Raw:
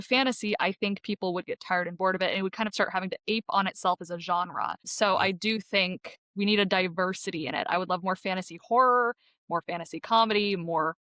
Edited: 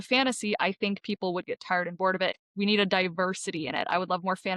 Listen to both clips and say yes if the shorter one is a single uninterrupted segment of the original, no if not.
no